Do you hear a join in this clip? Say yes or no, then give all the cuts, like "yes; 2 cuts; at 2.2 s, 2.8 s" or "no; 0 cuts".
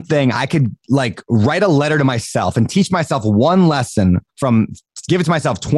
no; 0 cuts